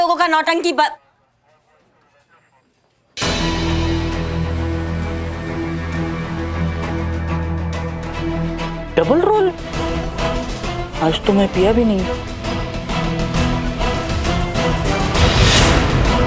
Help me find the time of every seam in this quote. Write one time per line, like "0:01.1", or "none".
0:08.2
0:09.7